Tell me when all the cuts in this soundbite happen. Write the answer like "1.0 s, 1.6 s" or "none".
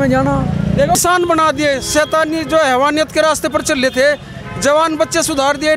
1.0 s

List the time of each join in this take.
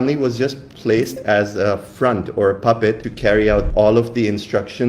3.7 s

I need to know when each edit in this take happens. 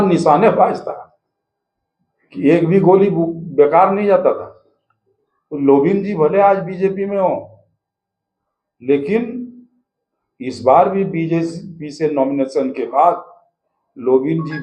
5.0 s

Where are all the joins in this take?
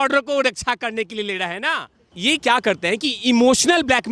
2.1 s

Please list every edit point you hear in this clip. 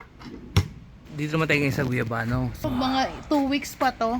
1.2 s, 2.6 s

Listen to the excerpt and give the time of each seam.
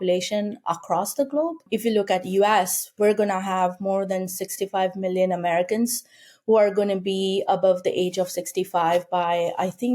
1.6 s

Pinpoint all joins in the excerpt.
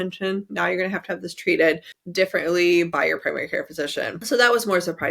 4.2 s

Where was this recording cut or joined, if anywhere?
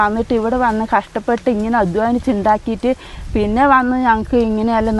none

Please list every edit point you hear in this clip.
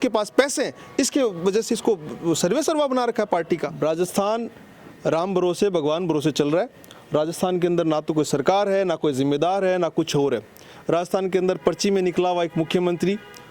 3.7 s

